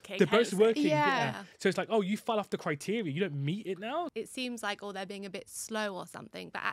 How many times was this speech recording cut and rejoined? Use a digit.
1